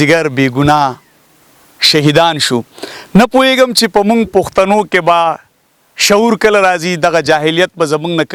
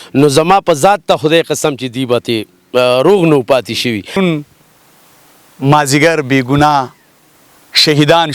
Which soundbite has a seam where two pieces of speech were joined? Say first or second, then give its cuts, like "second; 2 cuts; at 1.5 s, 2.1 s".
second; 1 cut; at 4.2 s